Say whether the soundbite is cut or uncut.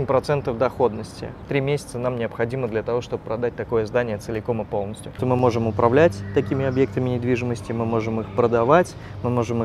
cut